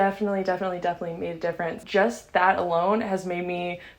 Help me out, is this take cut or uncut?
cut